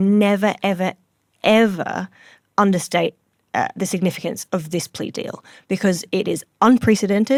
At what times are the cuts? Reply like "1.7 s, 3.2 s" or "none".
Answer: none